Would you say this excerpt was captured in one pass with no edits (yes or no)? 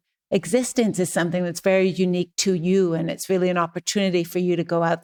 yes